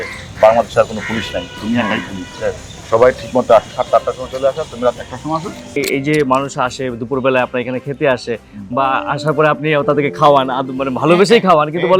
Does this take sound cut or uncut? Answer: cut